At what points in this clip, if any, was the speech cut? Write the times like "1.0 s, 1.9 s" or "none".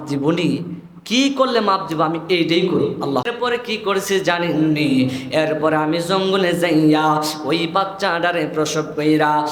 3.2 s